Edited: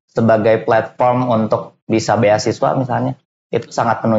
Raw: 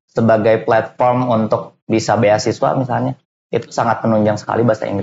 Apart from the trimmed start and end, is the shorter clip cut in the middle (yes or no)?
no